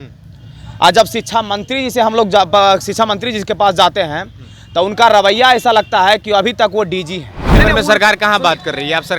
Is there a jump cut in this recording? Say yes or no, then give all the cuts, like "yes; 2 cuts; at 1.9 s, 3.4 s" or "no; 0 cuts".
yes; 1 cut; at 7.4 s